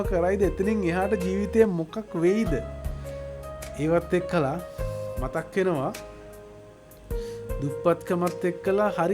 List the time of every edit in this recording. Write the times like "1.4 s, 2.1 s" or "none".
6.0 s, 7.6 s